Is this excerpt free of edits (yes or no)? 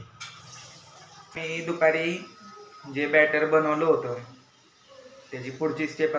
no